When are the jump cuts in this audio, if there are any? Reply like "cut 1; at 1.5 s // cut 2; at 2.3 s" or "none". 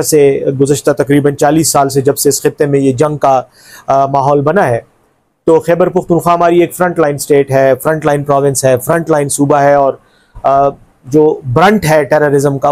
none